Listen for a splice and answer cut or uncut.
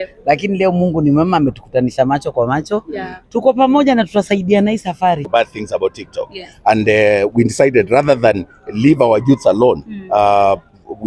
cut